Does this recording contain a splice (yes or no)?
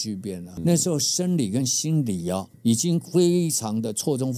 no